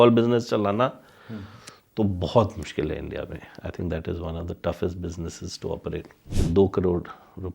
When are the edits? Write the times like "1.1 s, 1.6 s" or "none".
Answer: 6.2 s